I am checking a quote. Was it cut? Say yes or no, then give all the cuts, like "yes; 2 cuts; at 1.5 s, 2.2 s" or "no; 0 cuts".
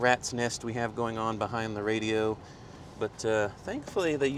no; 0 cuts